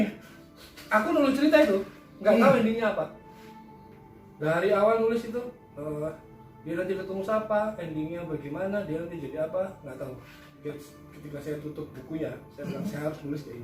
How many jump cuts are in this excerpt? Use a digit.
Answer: 1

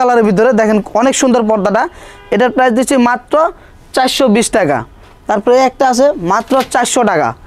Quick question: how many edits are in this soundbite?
0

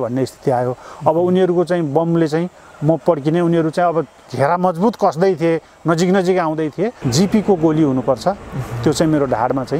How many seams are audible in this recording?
1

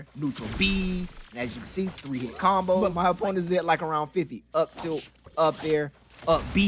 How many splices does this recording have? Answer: 1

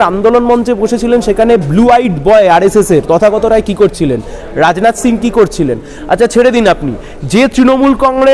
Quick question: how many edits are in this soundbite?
0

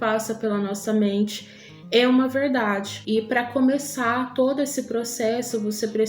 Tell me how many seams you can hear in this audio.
1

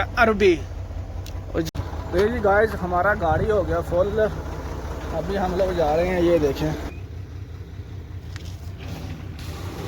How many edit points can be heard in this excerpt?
2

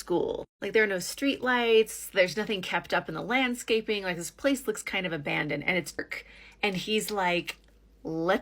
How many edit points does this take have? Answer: 1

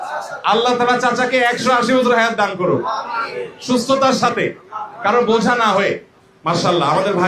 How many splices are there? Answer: 1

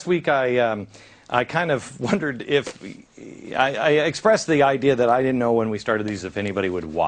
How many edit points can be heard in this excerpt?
1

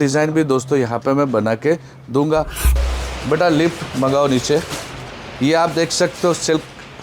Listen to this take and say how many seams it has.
1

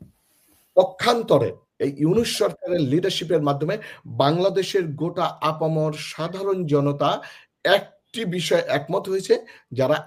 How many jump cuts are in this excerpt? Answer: 0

